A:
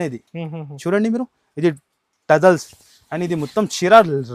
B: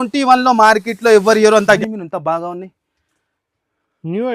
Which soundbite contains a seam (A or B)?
B